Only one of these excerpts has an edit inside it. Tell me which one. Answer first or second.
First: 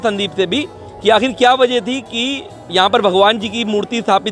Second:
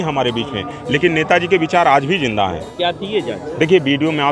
second